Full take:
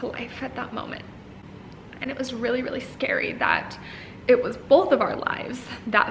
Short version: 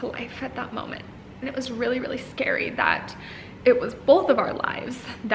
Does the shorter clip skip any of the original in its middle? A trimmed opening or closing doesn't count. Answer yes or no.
yes